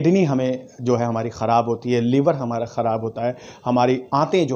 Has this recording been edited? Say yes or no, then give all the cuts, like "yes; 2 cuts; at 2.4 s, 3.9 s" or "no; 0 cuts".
no; 0 cuts